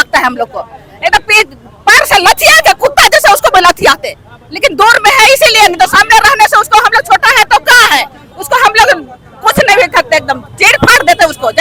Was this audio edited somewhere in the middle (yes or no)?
no